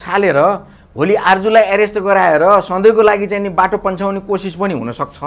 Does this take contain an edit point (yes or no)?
no